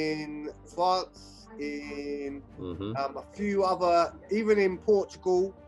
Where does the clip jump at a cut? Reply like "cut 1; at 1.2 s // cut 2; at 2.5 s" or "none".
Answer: none